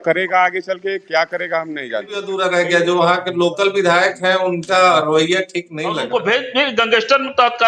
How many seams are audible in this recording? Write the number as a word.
two